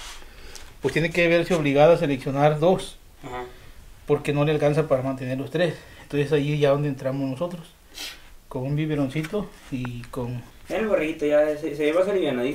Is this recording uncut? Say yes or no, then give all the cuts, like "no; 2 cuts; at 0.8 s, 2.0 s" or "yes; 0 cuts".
no; 1 cut; at 10.5 s